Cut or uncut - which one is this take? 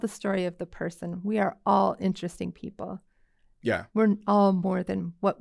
uncut